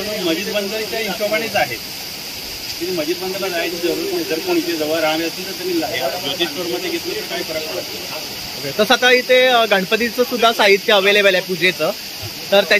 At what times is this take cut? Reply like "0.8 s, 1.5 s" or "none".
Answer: none